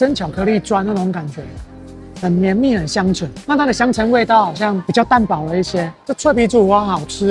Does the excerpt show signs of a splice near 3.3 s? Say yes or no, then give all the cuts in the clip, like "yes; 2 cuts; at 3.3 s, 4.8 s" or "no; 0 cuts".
yes; 2 cuts; at 3.3 s, 6.0 s